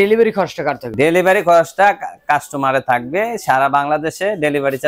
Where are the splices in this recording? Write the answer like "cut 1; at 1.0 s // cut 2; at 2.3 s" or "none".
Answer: cut 1; at 0.9 s